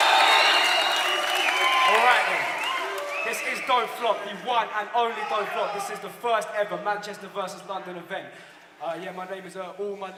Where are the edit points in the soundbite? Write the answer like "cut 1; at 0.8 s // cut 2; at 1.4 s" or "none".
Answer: none